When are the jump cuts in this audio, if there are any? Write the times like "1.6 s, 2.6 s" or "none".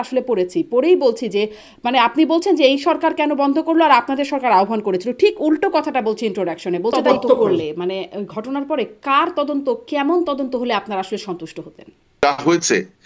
7.0 s, 12.2 s